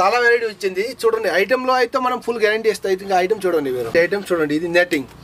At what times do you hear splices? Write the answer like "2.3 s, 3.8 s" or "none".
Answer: 3.9 s